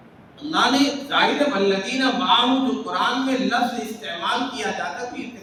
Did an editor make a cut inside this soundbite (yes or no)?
no